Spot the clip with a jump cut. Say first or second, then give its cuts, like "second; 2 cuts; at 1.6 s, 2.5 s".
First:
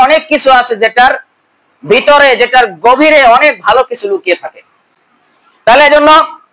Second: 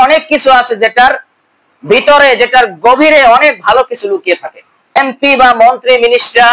second; 1 cut; at 5.0 s